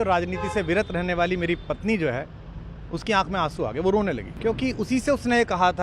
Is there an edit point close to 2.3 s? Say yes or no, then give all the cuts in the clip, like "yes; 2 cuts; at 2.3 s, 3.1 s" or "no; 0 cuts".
no; 1 cut; at 4.3 s